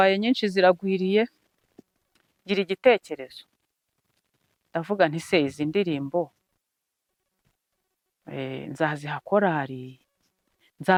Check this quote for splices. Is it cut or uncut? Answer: uncut